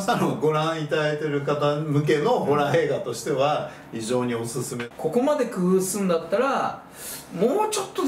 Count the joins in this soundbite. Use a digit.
1